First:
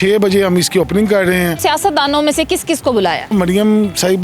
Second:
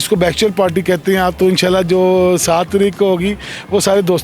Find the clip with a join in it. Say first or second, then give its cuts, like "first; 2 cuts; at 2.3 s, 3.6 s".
first; 2 cuts; at 1.6 s, 3.3 s